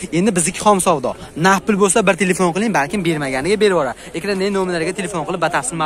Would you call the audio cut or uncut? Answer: uncut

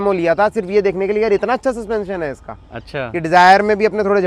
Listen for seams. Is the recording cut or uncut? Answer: uncut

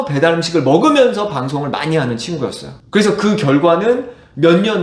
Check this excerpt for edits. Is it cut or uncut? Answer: uncut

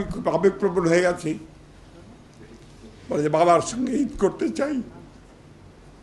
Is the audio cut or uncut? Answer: uncut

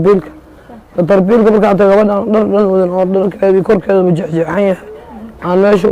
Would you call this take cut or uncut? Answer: uncut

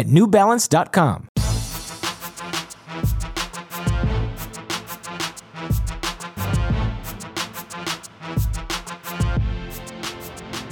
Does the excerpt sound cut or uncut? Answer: cut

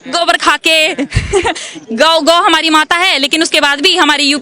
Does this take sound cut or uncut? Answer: uncut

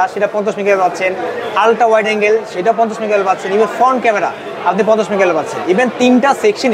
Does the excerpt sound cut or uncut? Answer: uncut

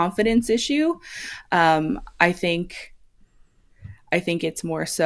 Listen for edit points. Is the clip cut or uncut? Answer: uncut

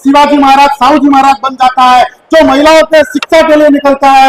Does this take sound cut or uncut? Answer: uncut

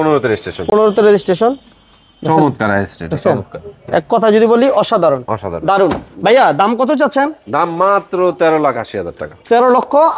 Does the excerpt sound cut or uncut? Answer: uncut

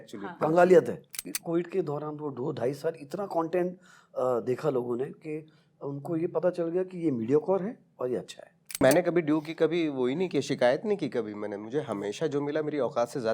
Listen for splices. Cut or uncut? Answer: cut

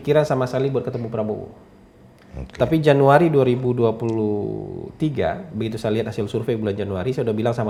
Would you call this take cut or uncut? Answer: uncut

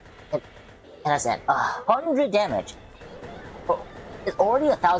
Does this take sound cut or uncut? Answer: uncut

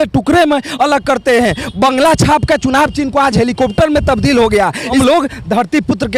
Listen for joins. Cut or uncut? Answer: uncut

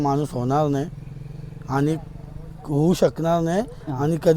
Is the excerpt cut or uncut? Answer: uncut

